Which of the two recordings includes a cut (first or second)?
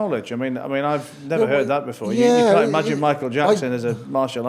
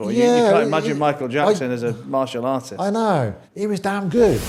second